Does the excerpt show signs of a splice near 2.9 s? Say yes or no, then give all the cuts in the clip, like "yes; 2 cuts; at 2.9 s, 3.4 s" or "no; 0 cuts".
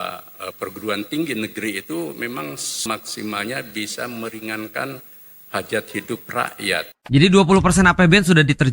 yes; 2 cuts; at 2.9 s, 6.9 s